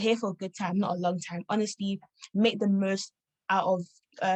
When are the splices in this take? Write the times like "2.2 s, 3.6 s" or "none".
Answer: none